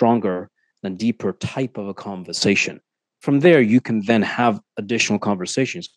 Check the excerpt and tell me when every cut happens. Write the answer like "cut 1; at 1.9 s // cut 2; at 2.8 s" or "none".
none